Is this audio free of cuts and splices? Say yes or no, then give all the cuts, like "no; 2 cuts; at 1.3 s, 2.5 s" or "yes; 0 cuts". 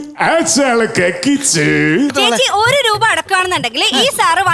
no; 1 cut; at 2.1 s